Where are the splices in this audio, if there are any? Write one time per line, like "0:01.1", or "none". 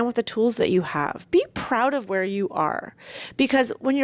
none